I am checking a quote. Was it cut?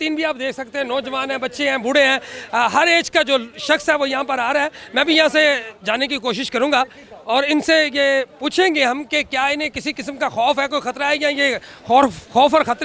no; 0 cuts

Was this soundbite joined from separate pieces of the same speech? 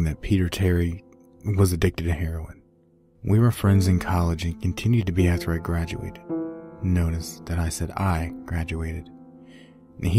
no; 0 cuts

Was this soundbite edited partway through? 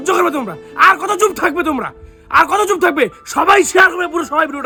no; 0 cuts

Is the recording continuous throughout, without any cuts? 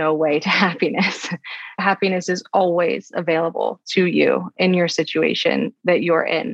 no; 1 cut; at 1.8 s

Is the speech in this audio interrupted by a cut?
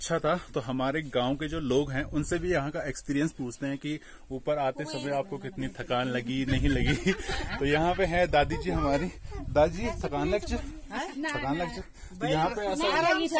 no; 0 cuts

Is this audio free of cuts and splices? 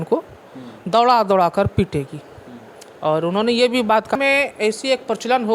no; 1 cut; at 4.2 s

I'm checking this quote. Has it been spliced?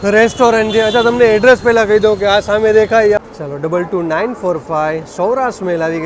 yes; 1 cut; at 3.2 s

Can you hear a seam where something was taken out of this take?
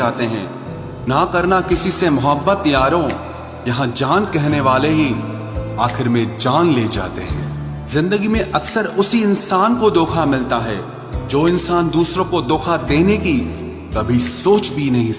no; 0 cuts

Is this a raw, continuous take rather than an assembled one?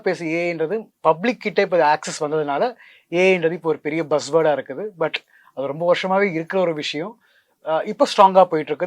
yes; 0 cuts

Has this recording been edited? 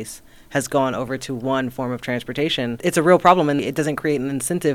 yes; 2 cuts; at 2.8 s, 3.6 s

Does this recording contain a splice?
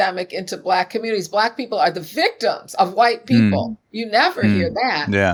no; 0 cuts

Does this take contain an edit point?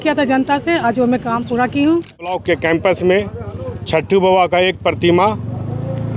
yes; 1 cut; at 2.3 s

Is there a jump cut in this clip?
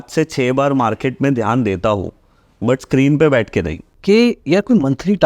yes; 1 cut; at 3.8 s

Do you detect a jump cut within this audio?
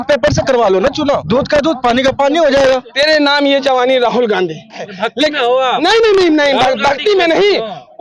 yes; 3 cuts; at 1.2 s, 2.9 s, 4.9 s

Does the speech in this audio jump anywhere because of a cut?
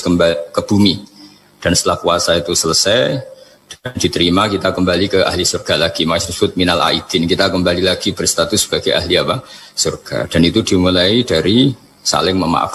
no; 0 cuts

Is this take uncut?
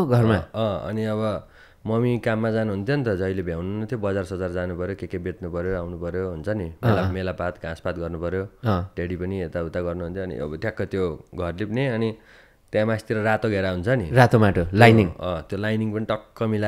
yes; 0 cuts

